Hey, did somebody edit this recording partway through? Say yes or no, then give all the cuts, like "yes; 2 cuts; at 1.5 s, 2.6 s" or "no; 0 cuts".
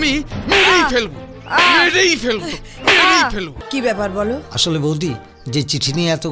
yes; 1 cut; at 3.6 s